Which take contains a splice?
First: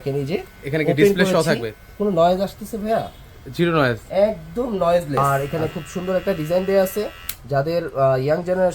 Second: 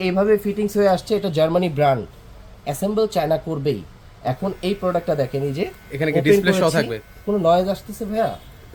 first; 1 cut; at 5.2 s

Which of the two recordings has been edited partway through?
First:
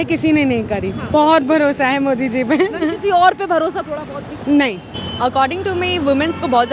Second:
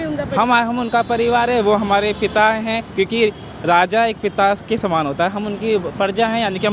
first; 2 cuts; at 1.0 s, 4.9 s

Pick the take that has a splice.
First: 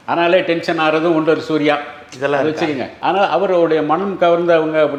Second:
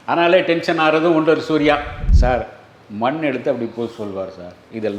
second; 1 cut; at 2.0 s

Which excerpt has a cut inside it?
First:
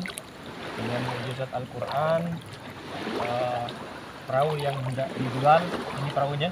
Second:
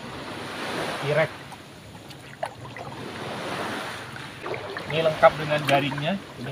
second; 1 cut; at 4.4 s

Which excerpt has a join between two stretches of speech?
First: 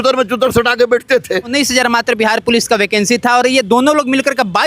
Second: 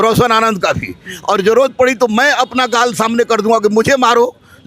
first; 1 cut; at 1.5 s

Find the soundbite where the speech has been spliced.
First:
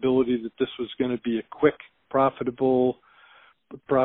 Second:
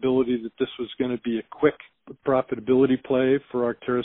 second; 1 cut; at 1.9 s

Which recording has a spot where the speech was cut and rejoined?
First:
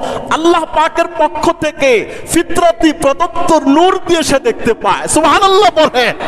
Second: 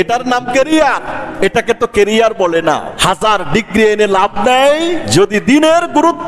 second; 3 cuts; at 1.2 s, 2.9 s, 5.0 s

